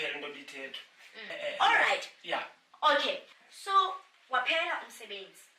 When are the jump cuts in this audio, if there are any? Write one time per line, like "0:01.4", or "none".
0:01.3

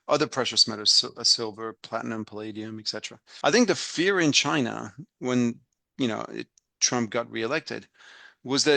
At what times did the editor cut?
0:03.2

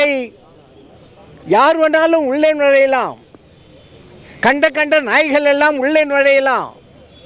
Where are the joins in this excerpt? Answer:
none

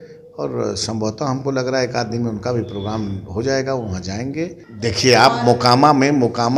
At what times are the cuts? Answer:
0:04.6

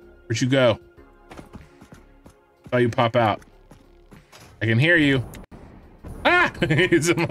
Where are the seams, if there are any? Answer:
0:06.4

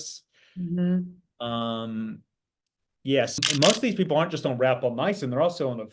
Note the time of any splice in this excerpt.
0:03.4

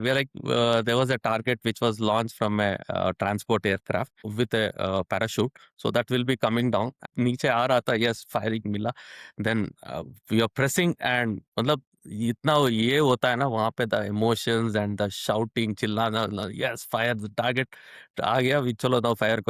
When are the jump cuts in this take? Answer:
0:07.0

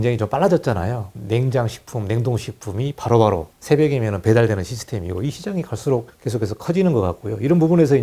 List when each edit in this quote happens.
0:01.1
0:03.5
0:06.1

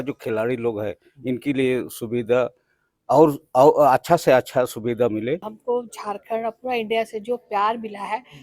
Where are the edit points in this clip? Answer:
0:05.5

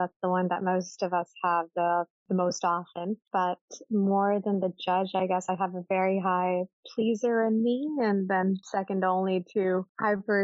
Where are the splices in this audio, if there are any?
0:03.2

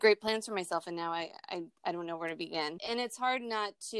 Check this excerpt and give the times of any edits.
0:02.8

